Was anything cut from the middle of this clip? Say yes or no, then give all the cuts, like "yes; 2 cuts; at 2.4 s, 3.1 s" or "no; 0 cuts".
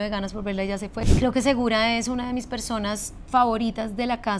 yes; 1 cut; at 1.0 s